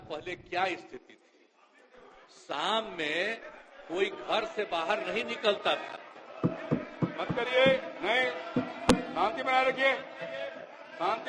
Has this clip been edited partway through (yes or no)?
no